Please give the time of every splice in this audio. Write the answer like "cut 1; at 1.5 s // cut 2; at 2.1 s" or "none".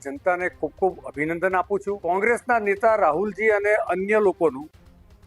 cut 1; at 2.0 s